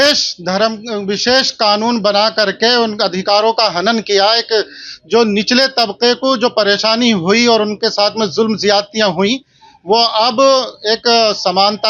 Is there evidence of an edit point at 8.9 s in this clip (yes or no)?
no